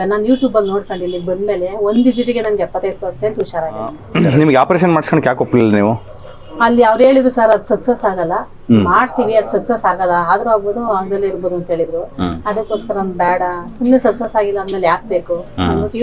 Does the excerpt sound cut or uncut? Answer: cut